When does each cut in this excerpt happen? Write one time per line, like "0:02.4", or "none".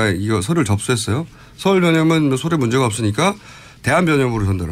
none